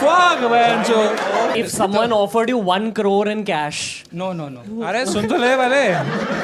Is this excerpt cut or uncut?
cut